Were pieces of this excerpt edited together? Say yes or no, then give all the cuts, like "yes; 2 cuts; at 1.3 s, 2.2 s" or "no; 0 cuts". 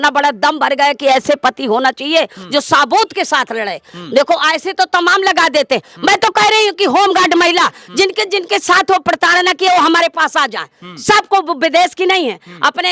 no; 0 cuts